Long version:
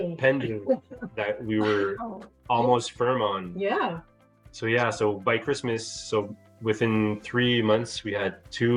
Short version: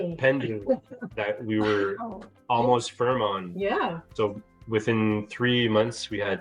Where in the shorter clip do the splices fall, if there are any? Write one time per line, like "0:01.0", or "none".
0:04.0

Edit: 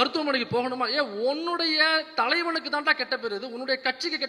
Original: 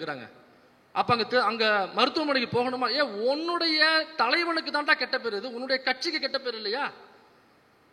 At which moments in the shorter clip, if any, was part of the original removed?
none

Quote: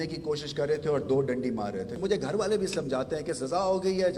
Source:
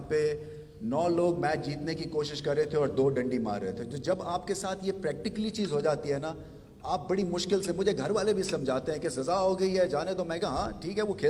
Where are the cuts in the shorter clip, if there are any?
0:02.0

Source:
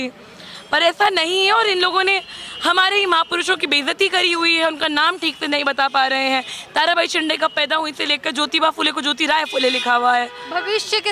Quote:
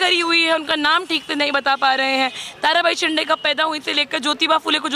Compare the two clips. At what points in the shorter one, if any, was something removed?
none

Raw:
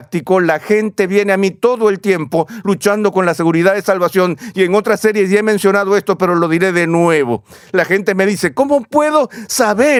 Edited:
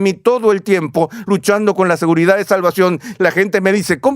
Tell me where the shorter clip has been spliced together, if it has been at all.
0:03.0

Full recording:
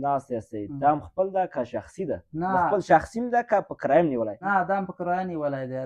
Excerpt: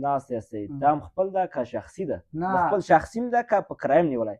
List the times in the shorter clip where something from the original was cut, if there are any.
none

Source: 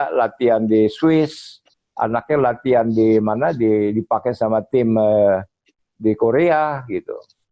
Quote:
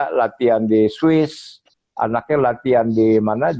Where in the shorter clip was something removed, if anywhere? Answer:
none

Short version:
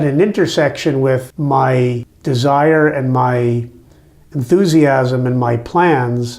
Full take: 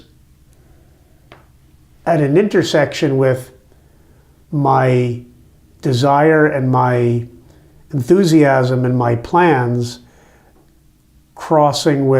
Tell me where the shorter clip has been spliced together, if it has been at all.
0:01.3
0:02.1

